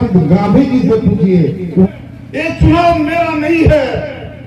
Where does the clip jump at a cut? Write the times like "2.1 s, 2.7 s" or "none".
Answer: 1.9 s